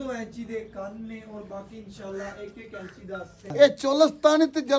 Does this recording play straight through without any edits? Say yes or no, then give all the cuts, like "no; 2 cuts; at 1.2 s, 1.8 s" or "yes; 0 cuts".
no; 1 cut; at 3.5 s